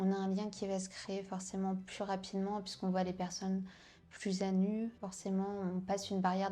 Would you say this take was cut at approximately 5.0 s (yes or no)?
yes